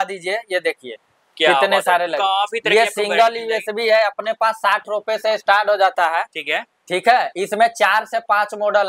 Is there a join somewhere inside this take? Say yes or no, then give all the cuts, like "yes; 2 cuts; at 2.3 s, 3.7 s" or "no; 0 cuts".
no; 0 cuts